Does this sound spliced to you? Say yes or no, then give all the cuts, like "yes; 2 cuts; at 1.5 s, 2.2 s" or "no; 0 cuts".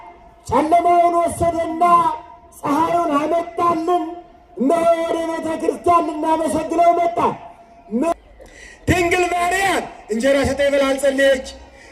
yes; 1 cut; at 8.1 s